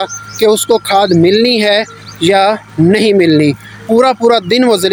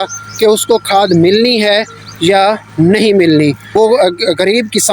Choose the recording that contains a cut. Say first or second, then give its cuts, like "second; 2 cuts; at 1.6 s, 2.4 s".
second; 1 cut; at 3.6 s